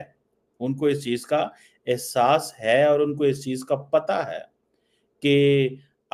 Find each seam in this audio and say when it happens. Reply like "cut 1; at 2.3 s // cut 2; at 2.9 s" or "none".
none